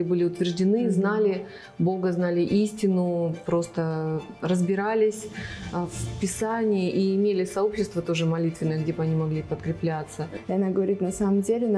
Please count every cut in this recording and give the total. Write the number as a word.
one